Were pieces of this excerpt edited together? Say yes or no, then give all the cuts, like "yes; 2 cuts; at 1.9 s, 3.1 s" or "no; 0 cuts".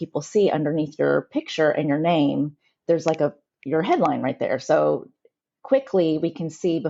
no; 0 cuts